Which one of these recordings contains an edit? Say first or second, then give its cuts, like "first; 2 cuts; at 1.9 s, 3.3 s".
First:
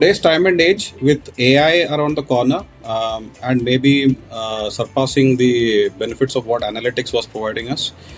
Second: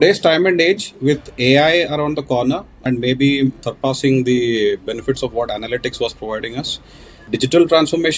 second; 3 cuts; at 2.7 s, 3.7 s, 7.2 s